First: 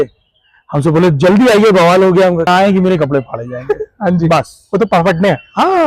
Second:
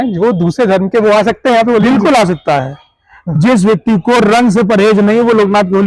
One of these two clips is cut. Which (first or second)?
first